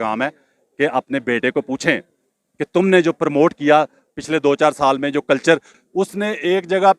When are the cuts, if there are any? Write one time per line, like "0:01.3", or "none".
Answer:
0:05.7